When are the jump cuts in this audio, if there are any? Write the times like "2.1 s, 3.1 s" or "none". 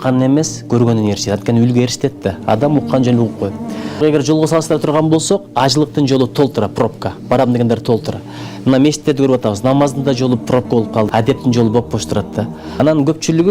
4.0 s, 11.1 s, 12.6 s